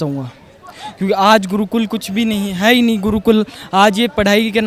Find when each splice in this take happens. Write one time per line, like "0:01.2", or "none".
none

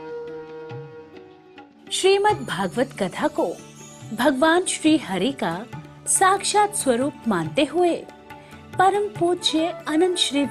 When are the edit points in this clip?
0:01.7

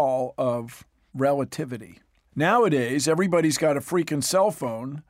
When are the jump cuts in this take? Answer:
none

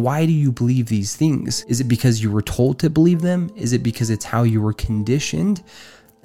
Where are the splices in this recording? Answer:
0:01.5

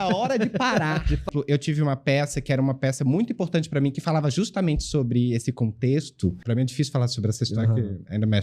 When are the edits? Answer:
0:01.3
0:06.4

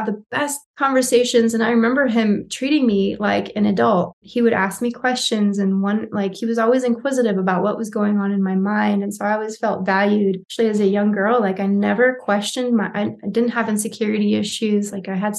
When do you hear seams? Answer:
0:04.2
0:10.5

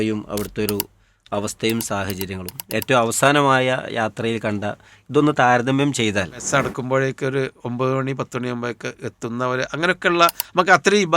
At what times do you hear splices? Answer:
0:06.4

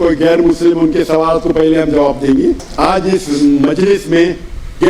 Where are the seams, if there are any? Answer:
0:02.7

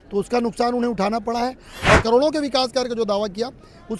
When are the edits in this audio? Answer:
0:02.0

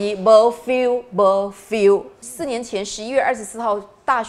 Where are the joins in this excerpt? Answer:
0:02.2

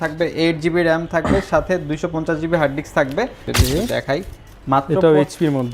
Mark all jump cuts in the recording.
0:03.5

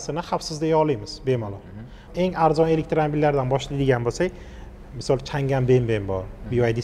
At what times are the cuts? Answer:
0:02.0

